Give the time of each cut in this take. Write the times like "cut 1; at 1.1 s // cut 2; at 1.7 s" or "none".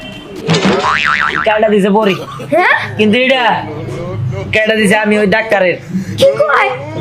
none